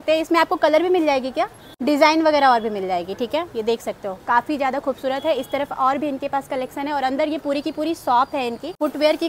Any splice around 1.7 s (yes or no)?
no